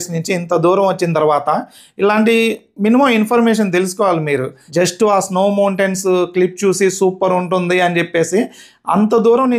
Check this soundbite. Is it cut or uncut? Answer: cut